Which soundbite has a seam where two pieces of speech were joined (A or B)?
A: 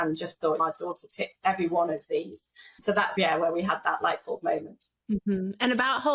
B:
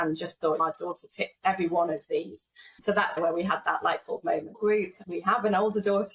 B